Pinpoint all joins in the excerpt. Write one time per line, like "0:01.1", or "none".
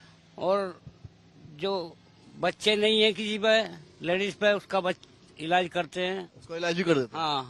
none